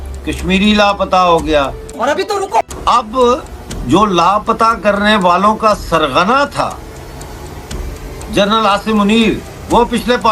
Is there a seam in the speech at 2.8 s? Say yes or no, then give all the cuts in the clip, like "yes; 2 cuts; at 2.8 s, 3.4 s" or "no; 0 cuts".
no; 0 cuts